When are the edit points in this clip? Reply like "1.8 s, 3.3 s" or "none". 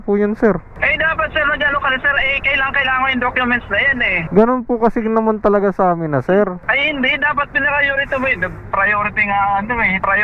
4.1 s